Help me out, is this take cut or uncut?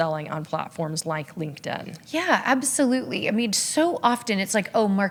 uncut